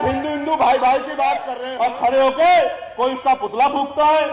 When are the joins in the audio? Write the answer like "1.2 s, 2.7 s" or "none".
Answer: 1.6 s

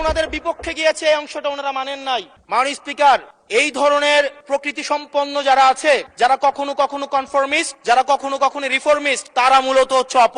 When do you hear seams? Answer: 2.3 s, 3.4 s, 4.4 s, 6.1 s, 7.7 s, 9.2 s

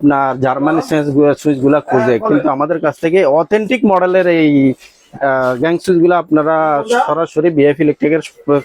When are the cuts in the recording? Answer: none

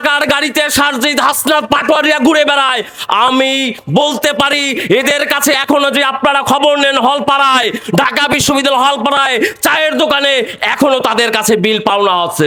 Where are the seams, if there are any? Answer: none

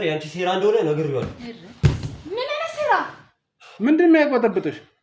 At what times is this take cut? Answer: none

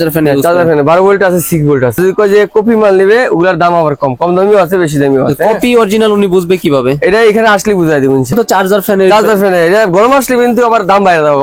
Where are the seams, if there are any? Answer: 2.0 s, 8.3 s

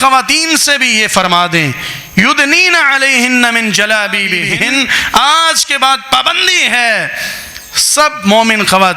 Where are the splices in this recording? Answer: 4.4 s

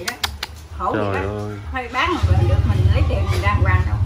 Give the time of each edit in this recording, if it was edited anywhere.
none

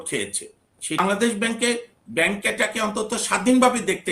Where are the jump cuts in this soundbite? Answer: 1.0 s

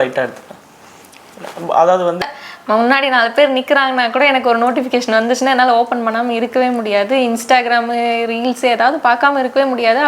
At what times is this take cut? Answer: 2.2 s

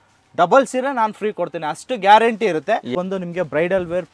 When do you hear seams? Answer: 2.9 s

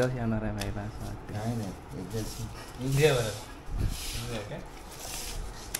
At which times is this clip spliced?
none

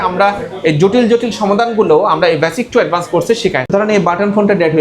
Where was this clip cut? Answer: 3.7 s

